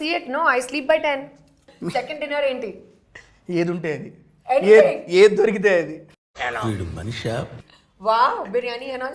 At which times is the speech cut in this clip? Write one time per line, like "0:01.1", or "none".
0:01.7